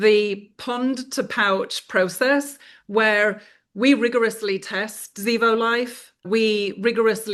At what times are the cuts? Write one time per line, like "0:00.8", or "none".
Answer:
none